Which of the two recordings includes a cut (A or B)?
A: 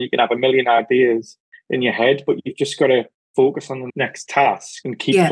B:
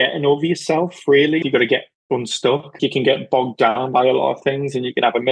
B